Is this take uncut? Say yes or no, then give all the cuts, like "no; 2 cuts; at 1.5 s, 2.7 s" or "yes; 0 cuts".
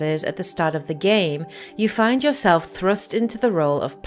no; 1 cut; at 3.0 s